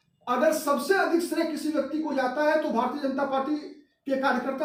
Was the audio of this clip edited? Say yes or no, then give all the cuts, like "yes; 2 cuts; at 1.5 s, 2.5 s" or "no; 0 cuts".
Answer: no; 0 cuts